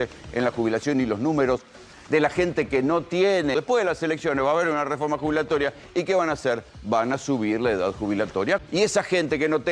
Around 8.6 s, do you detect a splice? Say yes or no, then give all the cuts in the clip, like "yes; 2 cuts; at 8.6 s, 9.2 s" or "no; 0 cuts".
yes; 2 cuts; at 3.5 s, 8.6 s